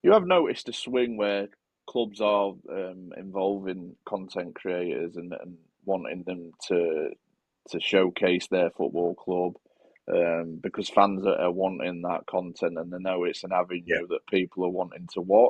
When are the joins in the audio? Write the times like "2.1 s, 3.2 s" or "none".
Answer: none